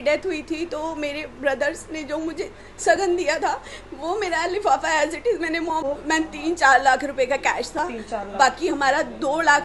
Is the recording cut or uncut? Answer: cut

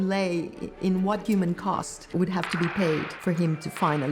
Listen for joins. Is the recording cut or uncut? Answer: cut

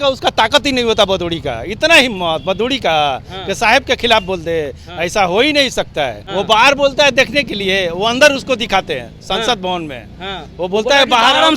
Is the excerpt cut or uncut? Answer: cut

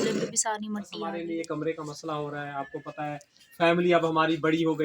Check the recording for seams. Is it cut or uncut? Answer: cut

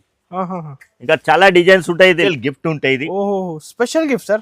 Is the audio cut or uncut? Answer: cut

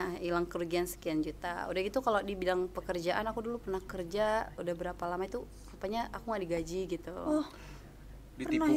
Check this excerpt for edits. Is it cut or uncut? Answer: uncut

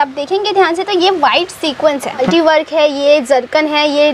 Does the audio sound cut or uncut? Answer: cut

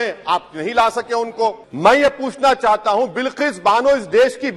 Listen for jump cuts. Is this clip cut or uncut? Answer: cut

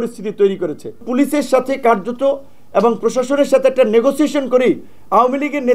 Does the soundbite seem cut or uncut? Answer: cut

